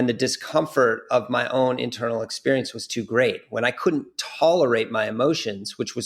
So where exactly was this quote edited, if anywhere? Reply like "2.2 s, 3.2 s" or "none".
none